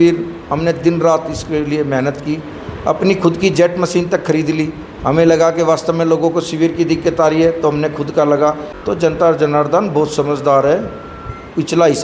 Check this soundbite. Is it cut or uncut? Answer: cut